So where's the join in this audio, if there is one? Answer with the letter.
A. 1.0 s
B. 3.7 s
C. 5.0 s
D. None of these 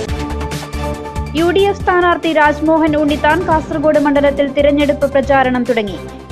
A